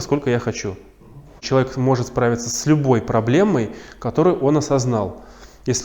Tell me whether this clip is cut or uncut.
cut